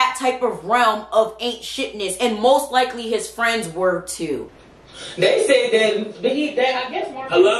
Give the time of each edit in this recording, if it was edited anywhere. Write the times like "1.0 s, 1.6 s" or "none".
4.5 s